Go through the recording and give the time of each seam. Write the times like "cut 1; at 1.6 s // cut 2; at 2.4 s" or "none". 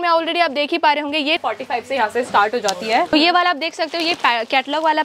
cut 1; at 1.4 s // cut 2; at 3.1 s